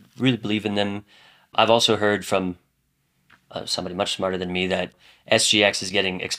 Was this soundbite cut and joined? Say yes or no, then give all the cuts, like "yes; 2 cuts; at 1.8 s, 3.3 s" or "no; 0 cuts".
yes; 2 cuts; at 1.5 s, 5.0 s